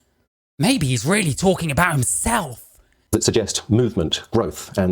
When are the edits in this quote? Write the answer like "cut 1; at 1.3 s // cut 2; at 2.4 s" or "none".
none